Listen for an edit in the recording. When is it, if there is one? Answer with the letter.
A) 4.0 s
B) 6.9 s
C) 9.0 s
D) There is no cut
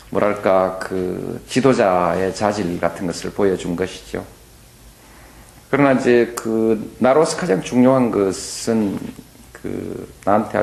D